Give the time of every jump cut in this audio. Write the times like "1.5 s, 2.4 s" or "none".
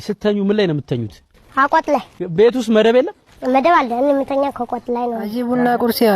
5.3 s